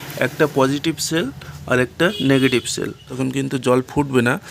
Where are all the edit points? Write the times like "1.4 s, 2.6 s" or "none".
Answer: 3.1 s

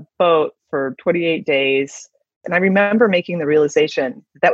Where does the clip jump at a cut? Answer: 2.4 s

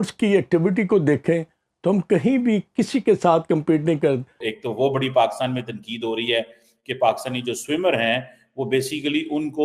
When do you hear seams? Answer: 4.4 s

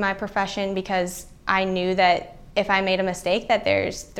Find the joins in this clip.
2.4 s

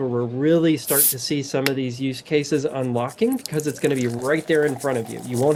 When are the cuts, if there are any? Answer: none

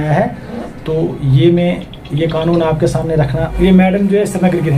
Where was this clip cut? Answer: 3.5 s

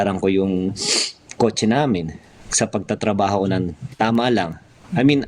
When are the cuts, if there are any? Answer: none

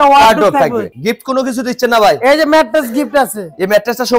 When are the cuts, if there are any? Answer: 0.9 s

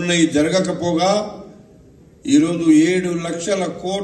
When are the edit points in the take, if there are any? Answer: 2.3 s

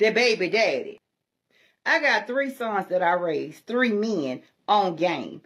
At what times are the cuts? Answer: 1.0 s

